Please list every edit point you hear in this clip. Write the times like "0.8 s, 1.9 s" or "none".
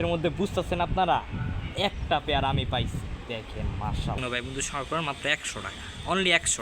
4.2 s